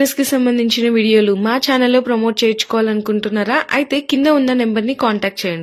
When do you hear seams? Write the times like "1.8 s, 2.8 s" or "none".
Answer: none